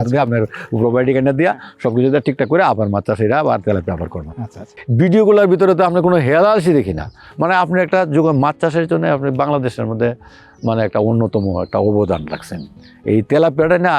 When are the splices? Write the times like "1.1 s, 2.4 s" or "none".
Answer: 4.7 s